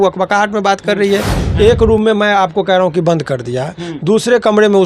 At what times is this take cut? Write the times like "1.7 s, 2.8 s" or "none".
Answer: 1.3 s